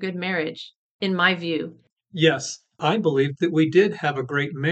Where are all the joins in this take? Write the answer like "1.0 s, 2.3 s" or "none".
1.8 s

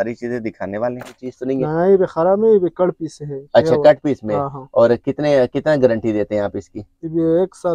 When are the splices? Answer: 1.3 s

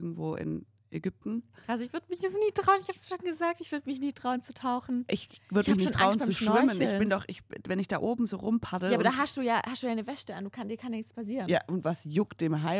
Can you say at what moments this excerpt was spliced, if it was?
1.5 s

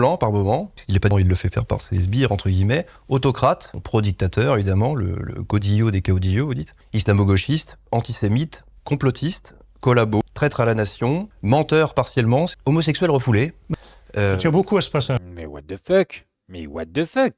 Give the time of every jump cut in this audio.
1.1 s, 10.2 s, 12.6 s

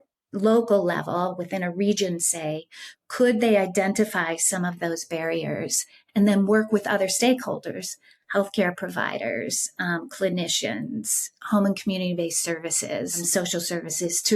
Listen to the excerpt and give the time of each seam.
none

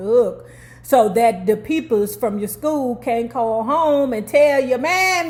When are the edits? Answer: none

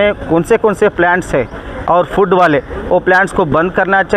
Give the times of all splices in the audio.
none

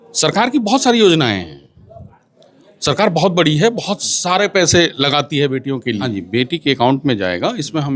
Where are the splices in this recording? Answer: 6.0 s

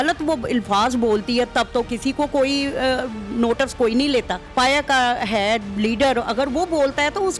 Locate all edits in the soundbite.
4.5 s

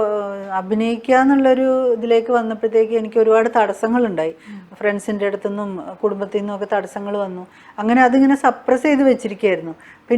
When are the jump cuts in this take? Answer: none

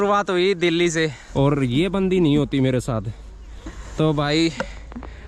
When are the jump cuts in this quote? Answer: 1.2 s

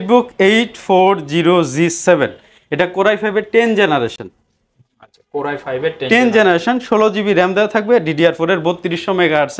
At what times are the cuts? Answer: none

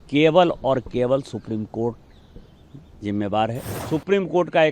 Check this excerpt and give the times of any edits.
3.7 s

